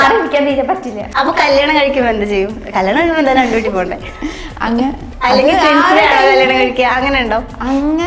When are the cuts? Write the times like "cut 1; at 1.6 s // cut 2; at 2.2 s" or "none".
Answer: cut 1; at 1.0 s

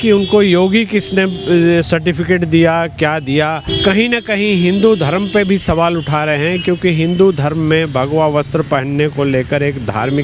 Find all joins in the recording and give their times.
cut 1; at 3.7 s

